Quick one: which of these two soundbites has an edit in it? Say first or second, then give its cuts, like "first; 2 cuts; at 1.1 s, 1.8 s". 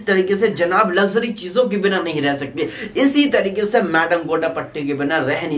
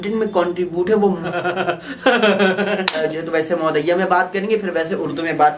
second; 2 cuts; at 1.3 s, 3.0 s